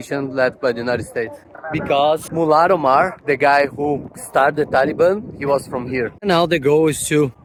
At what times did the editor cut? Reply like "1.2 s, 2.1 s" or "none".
none